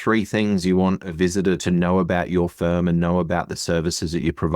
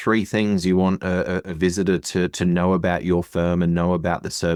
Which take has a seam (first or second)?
first